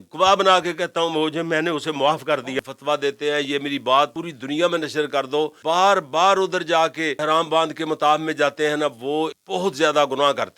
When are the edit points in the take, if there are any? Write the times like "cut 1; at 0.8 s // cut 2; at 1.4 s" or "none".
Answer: cut 1; at 2.6 s // cut 2; at 4.3 s // cut 3; at 5.6 s // cut 4; at 7.2 s // cut 5; at 9.4 s